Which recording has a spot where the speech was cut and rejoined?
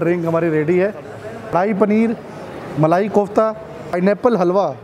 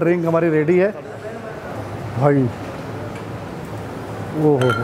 first; 2 cuts; at 1.5 s, 3.9 s

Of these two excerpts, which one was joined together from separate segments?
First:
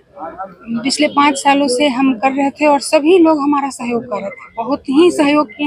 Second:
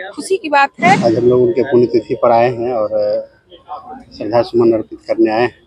second; 1 cut; at 1.0 s

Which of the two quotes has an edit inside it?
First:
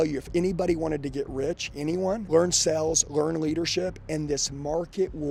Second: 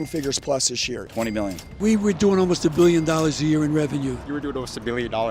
second; 2 cuts; at 1.2 s, 4.2 s

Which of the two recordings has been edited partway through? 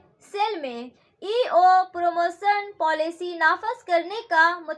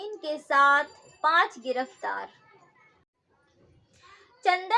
second; 1 cut; at 3.1 s

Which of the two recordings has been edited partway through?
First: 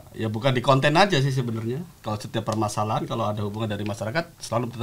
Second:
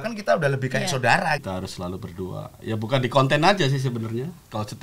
second; 1 cut; at 1.4 s

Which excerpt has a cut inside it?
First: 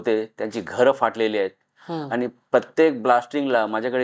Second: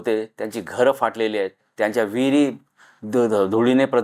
second; 1 cut; at 1.6 s

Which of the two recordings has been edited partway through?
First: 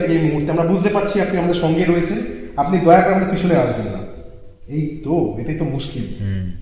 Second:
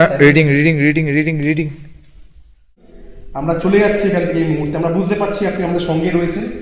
second; 1 cut; at 2.9 s

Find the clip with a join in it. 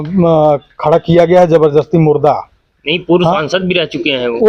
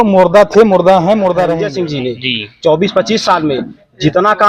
second; 1 cut; at 1.7 s

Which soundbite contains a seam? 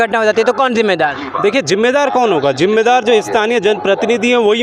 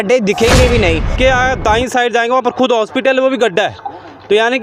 second; 1 cut; at 1.1 s

